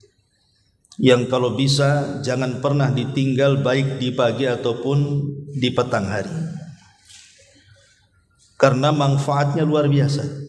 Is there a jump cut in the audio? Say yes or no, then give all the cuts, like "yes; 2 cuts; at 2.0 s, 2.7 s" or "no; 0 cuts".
no; 0 cuts